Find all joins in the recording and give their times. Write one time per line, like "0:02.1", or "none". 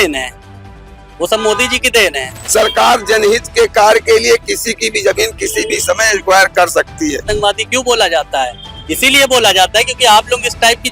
0:02.3
0:07.3